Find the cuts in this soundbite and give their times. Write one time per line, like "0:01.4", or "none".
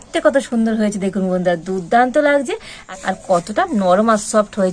0:02.8